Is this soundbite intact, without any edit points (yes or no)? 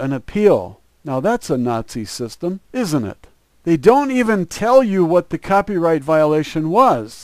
no